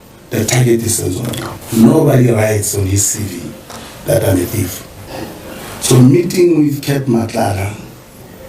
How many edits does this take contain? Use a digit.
1